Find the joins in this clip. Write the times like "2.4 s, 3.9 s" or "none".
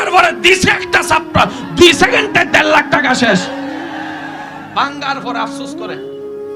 5.5 s